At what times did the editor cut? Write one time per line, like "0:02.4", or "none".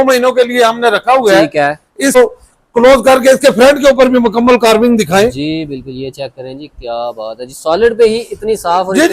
0:02.2